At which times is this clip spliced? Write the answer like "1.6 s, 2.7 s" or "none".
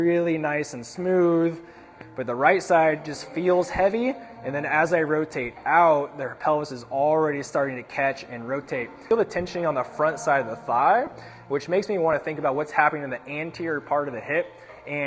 2.0 s, 9.0 s